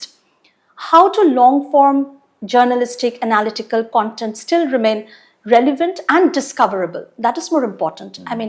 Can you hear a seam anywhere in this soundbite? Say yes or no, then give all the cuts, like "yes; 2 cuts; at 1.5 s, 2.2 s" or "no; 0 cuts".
no; 0 cuts